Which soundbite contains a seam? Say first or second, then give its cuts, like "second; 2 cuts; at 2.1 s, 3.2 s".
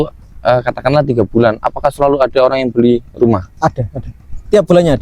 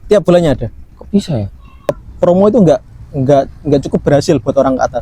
second; 1 cut; at 2.0 s